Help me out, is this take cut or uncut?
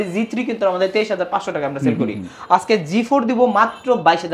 uncut